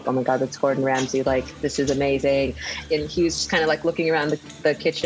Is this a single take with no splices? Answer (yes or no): no